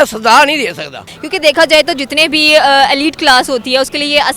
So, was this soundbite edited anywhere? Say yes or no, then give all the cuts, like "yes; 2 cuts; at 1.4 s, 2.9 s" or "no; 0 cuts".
yes; 1 cut; at 1.1 s